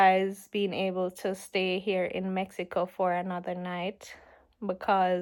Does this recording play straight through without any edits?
yes; 0 cuts

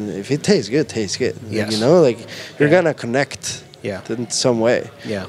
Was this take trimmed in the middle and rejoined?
no; 0 cuts

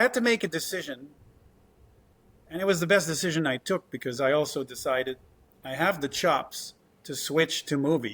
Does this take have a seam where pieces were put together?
no; 0 cuts

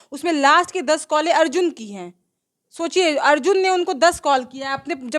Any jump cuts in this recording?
no; 0 cuts

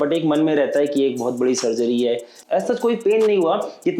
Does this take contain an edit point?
yes; 1 cut; at 2.3 s

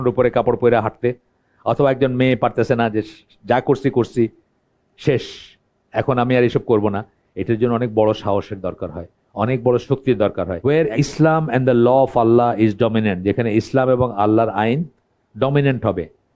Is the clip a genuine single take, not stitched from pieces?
no; 1 cut; at 10.5 s

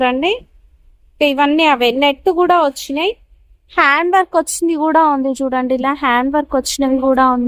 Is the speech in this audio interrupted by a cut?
no; 0 cuts

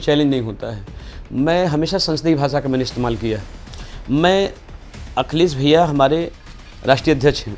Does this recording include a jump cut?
no; 0 cuts

